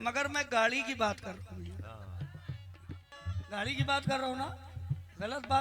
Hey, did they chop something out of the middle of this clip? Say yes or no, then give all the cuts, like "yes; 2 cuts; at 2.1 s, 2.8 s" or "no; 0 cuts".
yes; 1 cut; at 3.1 s